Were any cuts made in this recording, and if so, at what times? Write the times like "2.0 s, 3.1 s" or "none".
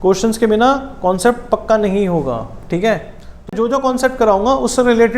3.5 s